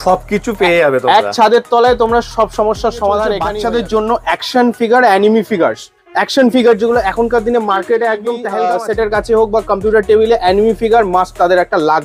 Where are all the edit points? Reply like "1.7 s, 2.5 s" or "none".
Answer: 3.4 s, 8.6 s